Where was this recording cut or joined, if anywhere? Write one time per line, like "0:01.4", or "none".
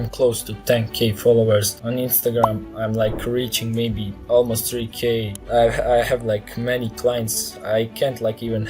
0:01.8
0:04.1
0:05.3